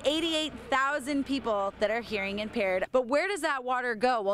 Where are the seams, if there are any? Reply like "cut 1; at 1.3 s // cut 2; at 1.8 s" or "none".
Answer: cut 1; at 2.9 s